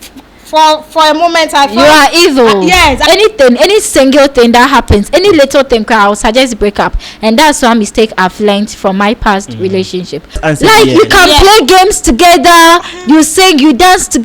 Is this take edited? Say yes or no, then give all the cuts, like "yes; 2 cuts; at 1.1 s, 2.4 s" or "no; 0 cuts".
yes; 2 cuts; at 3.0 s, 10.4 s